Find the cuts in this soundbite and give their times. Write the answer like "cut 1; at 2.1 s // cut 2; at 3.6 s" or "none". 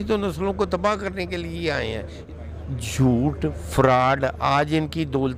cut 1; at 2.2 s

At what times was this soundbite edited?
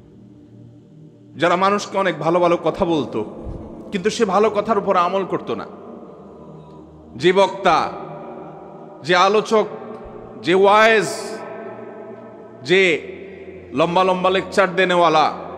cut 1; at 0.9 s

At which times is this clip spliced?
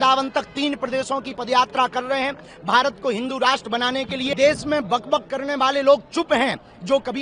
cut 1; at 4.3 s

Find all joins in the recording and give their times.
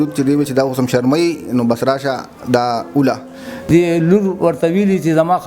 cut 1; at 3.7 s

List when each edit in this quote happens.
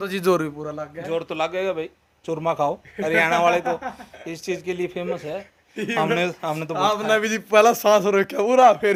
none

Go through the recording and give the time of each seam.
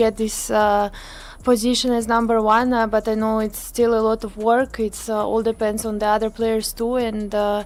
none

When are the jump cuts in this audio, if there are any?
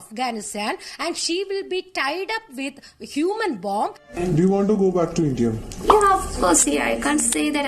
cut 1; at 4.1 s // cut 2; at 5.8 s

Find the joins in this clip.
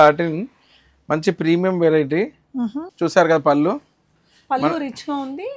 cut 1; at 2.8 s

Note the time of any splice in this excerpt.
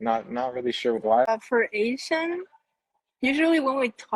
cut 1; at 1.3 s

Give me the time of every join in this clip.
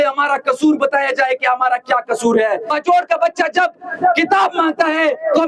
cut 1; at 2.7 s

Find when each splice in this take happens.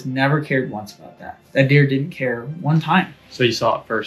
cut 1; at 1.4 s

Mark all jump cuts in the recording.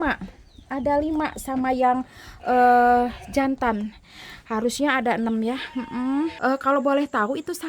cut 1; at 6.3 s

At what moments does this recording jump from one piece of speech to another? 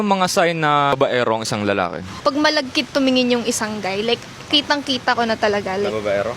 cut 1; at 0.9 s // cut 2; at 2.2 s

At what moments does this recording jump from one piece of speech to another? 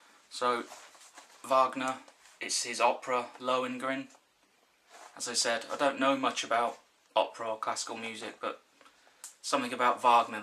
none

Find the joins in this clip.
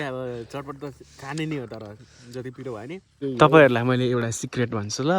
cut 1; at 3.2 s

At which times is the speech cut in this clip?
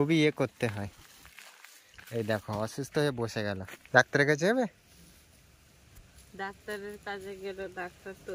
cut 1; at 3.7 s

